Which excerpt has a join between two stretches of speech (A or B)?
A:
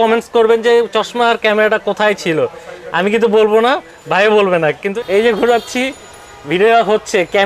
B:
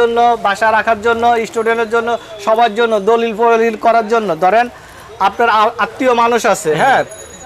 A